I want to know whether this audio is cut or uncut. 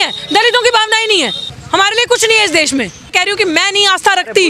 cut